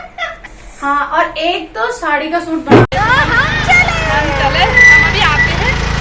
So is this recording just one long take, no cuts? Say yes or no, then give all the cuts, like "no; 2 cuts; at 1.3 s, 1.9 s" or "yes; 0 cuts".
no; 1 cut; at 2.9 s